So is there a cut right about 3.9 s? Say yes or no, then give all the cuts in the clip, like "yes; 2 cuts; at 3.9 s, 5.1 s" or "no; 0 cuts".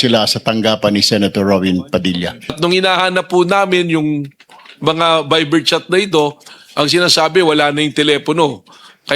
no; 1 cut; at 2.6 s